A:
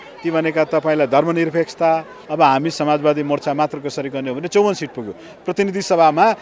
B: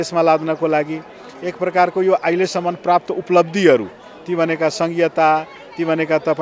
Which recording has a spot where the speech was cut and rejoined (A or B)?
A